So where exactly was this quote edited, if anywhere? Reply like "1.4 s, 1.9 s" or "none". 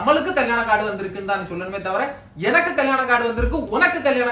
none